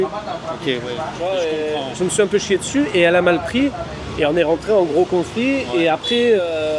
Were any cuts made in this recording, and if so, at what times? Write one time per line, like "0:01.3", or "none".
none

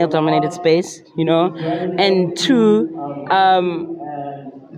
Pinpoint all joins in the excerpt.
none

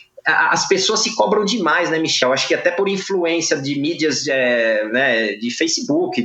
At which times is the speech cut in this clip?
0:02.2

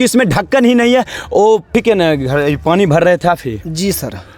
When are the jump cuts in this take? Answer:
0:01.7

